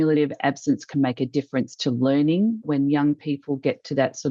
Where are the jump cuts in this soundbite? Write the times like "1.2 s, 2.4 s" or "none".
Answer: 2.6 s